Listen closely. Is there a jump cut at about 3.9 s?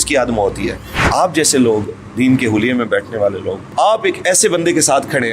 yes; 2 cuts; at 0.9 s, 3.9 s

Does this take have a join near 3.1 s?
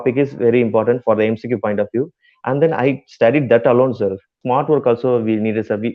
no; 1 cut; at 4.3 s

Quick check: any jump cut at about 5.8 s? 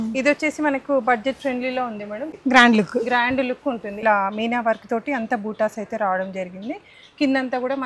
no; 2 cuts; at 2.3 s, 4.0 s

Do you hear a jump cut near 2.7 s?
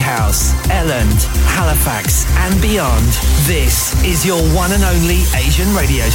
no; 0 cuts

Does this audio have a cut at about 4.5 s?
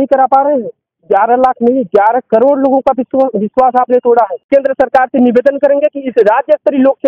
yes; 1 cut; at 4.5 s

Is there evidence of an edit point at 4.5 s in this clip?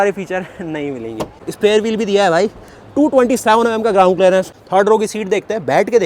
yes; 2 cuts; at 1.4 s, 4.5 s

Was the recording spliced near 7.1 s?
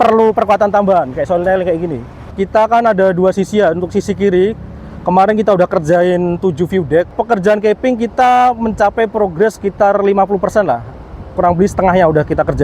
yes; 2 cuts; at 2.3 s, 7.1 s

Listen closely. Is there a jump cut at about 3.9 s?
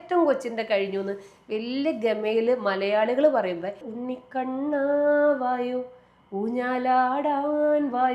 yes; 1 cut; at 3.9 s

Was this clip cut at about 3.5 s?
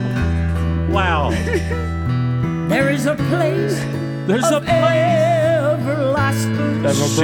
no; 0 cuts

